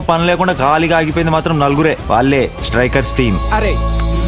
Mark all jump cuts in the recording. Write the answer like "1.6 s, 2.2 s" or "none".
none